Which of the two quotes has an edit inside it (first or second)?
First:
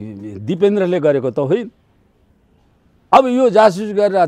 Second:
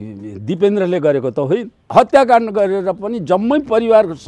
second